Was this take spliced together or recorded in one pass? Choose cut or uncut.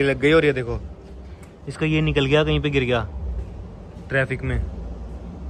uncut